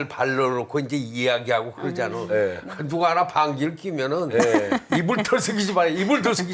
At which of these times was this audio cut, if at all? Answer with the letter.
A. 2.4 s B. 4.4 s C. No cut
C